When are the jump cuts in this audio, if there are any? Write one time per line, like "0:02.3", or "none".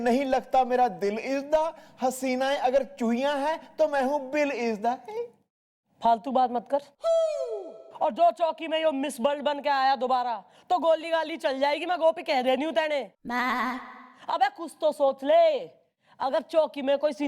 none

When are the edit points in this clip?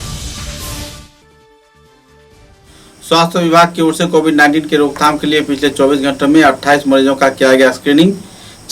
0:02.4

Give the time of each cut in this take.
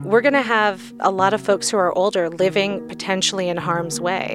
0:01.0

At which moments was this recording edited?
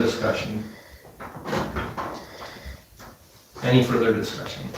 none

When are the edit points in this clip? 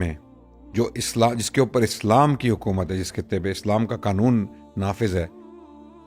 none

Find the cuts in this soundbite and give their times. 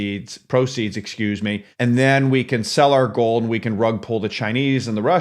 0:01.7

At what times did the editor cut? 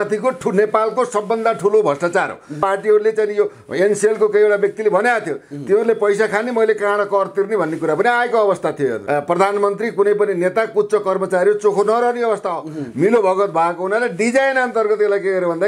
0:02.6
0:09.0

